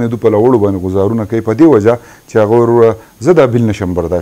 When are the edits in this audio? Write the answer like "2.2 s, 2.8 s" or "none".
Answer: none